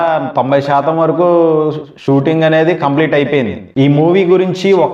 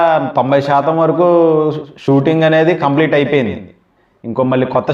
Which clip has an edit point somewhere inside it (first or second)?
first